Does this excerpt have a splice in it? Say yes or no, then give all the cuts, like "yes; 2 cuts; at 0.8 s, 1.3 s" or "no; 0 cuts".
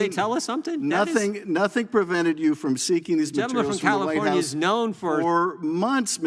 no; 0 cuts